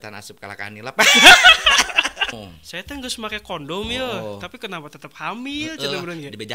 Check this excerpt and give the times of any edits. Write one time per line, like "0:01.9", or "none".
0:02.3